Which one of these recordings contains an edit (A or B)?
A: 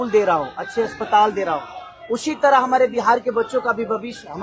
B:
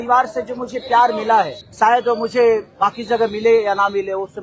B